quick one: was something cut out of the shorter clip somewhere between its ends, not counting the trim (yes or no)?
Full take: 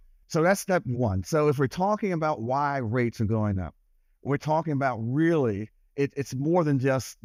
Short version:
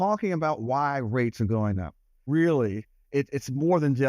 yes